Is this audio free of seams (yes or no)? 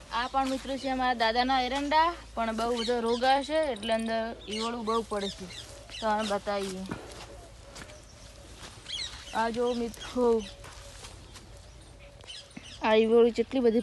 yes